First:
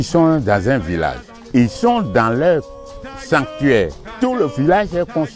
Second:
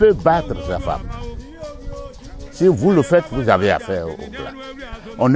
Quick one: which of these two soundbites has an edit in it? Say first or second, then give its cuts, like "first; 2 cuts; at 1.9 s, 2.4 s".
first; 2 cuts; at 1.3 s, 4.1 s